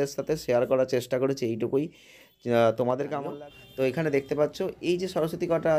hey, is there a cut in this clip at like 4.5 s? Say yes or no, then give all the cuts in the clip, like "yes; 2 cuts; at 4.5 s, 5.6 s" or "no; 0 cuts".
no; 1 cut; at 3.3 s